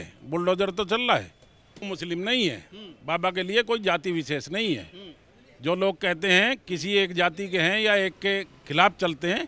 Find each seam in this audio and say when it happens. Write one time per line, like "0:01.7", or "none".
none